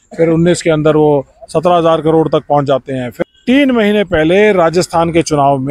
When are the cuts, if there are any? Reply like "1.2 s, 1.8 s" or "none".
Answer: 3.1 s